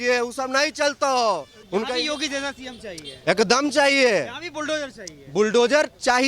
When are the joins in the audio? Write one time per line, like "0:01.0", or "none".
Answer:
0:01.5